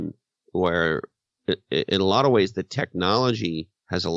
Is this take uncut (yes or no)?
yes